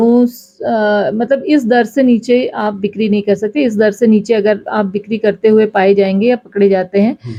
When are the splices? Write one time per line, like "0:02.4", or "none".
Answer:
none